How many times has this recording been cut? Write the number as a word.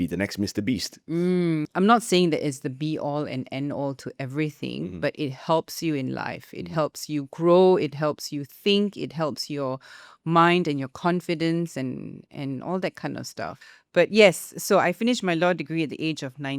two